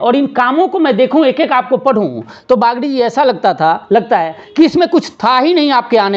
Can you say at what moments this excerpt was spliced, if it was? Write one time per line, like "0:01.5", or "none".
none